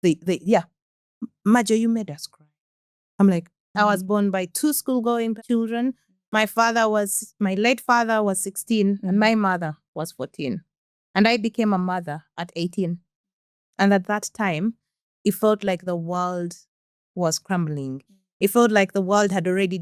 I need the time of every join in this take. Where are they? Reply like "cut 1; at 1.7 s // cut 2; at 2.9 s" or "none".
cut 1; at 3.7 s // cut 2; at 5.4 s